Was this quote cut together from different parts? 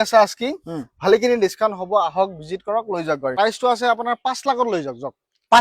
yes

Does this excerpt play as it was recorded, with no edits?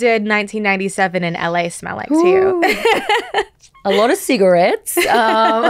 yes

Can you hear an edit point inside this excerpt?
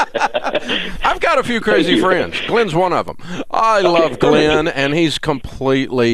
no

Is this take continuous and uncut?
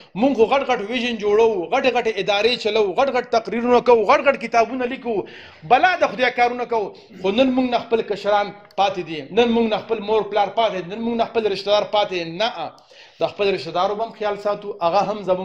yes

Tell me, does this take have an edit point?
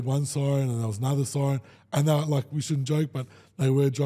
no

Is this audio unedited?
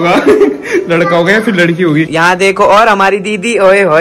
no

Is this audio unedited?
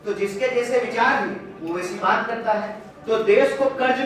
no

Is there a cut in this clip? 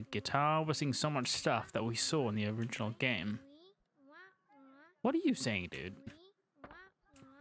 no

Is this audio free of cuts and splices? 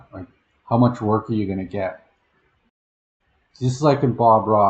no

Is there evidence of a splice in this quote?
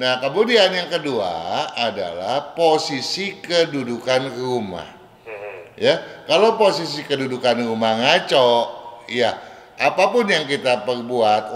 no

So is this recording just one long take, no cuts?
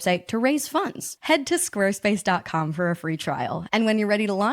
no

